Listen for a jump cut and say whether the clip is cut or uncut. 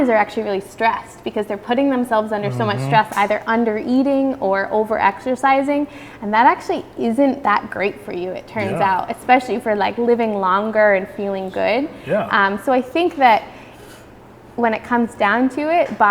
uncut